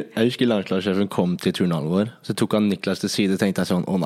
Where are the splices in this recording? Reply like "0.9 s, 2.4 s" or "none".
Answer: none